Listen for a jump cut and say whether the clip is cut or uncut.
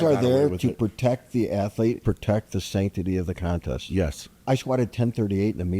cut